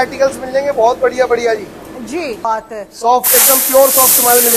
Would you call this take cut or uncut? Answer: cut